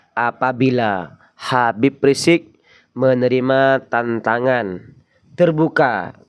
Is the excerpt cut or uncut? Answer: uncut